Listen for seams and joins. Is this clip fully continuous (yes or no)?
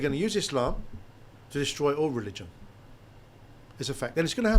yes